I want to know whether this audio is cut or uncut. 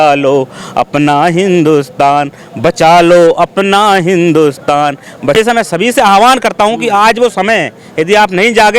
cut